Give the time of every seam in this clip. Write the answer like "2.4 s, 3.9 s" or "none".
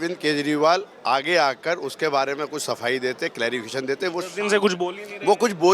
none